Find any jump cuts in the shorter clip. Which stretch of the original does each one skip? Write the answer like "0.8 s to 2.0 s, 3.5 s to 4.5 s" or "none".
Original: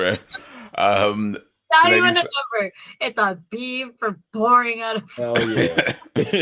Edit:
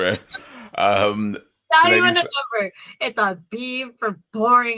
none